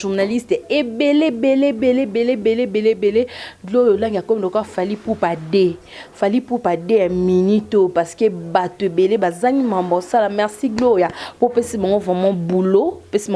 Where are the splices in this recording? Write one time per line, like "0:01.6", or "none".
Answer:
none